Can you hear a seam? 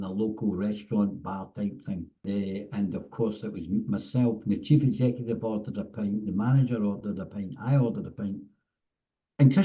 yes; 1 cut; at 2.3 s

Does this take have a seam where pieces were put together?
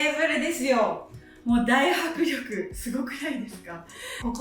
no; 0 cuts

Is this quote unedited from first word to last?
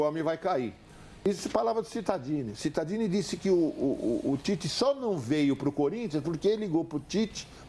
no; 1 cut; at 1.3 s

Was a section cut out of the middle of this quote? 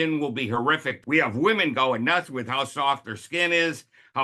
yes; 1 cut; at 1.0 s

